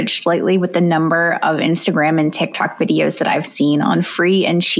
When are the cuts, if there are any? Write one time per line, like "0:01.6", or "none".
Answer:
none

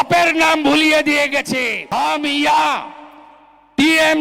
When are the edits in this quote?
0:01.8

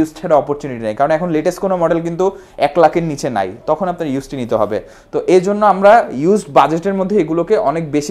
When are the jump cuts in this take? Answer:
none

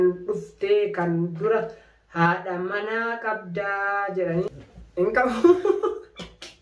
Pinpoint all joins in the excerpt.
0:04.5

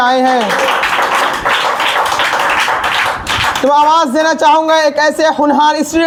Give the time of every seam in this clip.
none

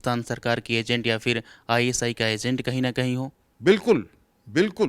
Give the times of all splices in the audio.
0:03.4

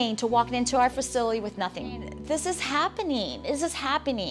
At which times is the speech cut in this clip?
0:01.9

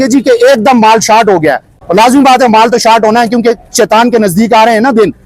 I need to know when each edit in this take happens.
none

